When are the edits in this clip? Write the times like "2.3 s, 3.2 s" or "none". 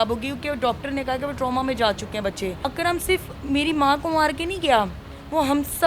none